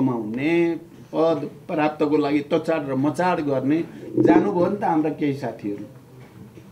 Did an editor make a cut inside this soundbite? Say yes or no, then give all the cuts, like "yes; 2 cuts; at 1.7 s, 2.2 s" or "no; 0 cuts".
no; 0 cuts